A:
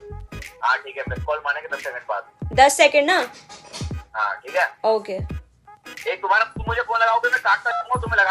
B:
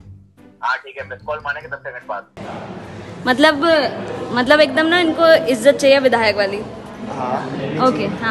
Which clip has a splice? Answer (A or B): B